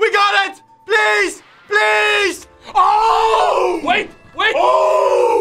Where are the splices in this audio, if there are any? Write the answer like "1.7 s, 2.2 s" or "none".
2.5 s